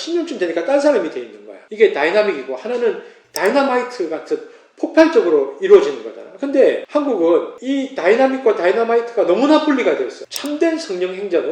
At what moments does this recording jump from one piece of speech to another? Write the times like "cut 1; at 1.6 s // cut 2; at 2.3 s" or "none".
cut 1; at 10.2 s